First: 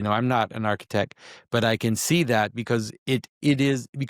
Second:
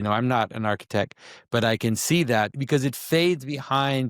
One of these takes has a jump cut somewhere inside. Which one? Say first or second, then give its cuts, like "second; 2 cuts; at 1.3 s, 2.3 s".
second; 1 cut; at 2.6 s